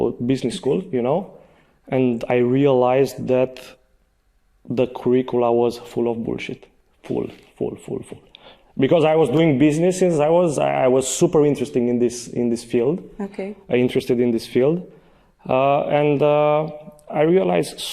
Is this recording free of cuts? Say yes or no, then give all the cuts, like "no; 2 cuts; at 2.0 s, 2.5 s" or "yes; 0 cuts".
yes; 0 cuts